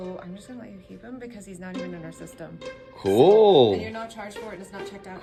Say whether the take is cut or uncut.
uncut